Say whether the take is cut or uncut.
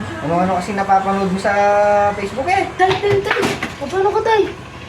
cut